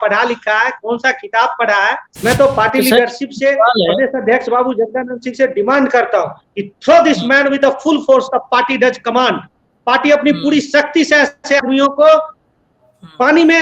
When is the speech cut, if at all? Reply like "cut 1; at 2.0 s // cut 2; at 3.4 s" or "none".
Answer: cut 1; at 2.1 s